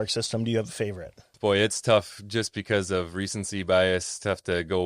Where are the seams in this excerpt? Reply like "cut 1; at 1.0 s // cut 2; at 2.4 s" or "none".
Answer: cut 1; at 1.3 s